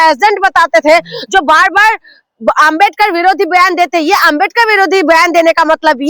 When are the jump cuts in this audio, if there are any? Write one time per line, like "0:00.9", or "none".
none